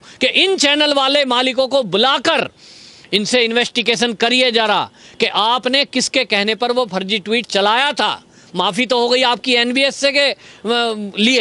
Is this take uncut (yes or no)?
yes